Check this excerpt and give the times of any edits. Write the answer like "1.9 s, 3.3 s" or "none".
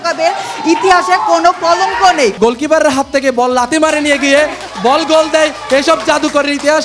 2.4 s